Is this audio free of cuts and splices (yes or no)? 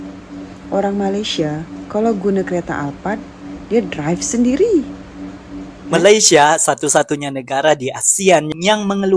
no